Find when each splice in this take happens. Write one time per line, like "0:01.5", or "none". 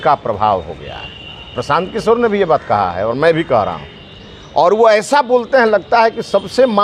none